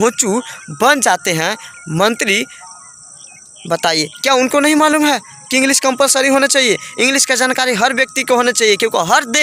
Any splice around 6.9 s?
no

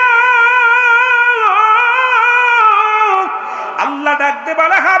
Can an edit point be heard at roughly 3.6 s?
yes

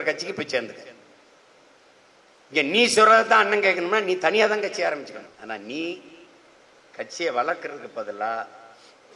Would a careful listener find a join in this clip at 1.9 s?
no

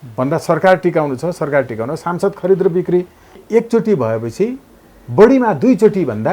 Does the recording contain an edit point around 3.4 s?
yes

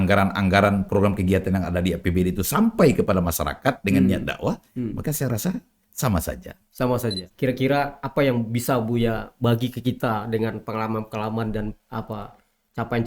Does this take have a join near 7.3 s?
yes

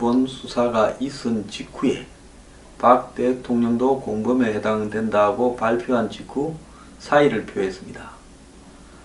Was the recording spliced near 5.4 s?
yes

